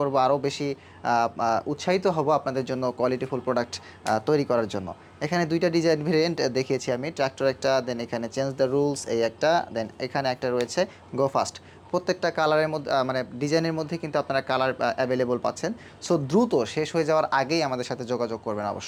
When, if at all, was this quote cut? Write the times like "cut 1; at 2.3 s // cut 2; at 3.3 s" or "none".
none